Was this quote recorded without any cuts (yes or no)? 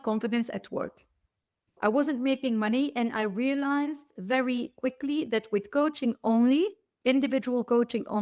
no